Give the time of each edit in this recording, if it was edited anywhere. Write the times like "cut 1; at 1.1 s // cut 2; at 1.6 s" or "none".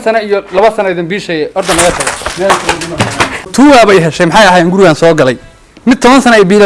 cut 1; at 3.4 s